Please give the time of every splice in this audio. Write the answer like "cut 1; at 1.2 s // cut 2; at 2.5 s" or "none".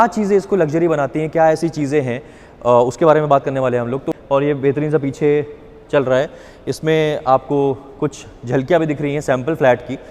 cut 1; at 4.0 s